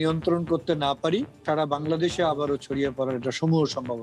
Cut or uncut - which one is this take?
cut